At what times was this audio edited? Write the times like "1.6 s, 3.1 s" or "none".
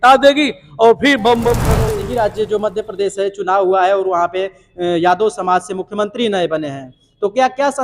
1.7 s

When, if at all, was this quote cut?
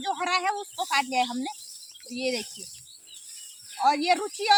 none

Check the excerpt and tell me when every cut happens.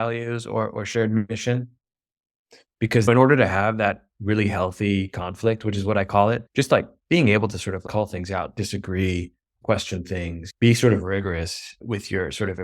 3.0 s

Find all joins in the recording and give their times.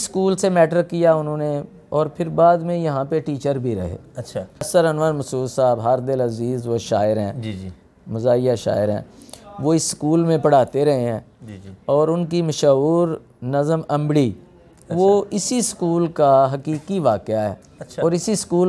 4.7 s

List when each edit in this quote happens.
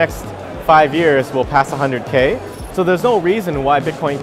2.6 s

